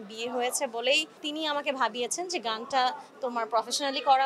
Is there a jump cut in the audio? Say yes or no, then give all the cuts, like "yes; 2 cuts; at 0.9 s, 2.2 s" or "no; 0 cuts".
yes; 1 cut; at 1.2 s